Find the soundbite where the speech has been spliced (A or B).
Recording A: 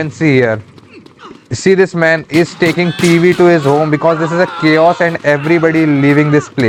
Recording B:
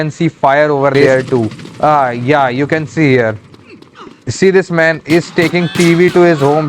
B